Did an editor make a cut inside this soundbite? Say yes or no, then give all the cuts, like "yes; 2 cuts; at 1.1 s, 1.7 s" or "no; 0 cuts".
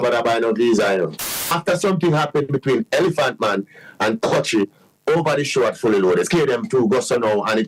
yes; 2 cuts; at 1.2 s, 6.3 s